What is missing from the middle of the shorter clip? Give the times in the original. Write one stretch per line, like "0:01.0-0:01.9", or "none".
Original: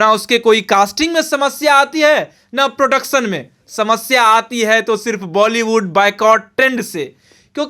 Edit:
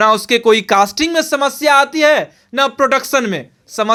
none